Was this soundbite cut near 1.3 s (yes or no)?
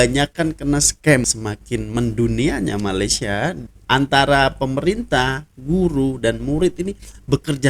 yes